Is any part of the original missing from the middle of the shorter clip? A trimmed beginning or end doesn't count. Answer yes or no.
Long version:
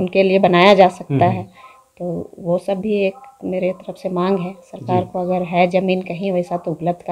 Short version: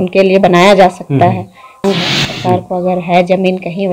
yes